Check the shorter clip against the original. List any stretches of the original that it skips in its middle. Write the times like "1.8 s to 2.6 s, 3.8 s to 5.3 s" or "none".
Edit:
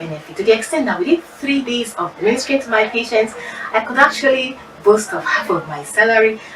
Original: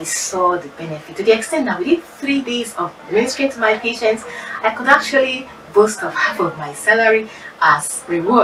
2.9 s to 3.0 s